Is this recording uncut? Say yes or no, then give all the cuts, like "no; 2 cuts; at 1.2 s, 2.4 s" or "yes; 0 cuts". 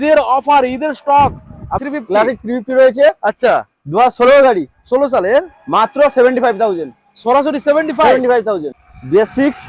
no; 2 cuts; at 1.8 s, 8.8 s